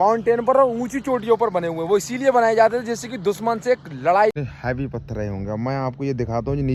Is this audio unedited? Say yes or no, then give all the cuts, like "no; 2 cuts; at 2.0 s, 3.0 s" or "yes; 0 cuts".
no; 1 cut; at 4.4 s